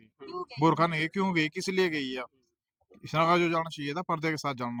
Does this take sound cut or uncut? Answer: uncut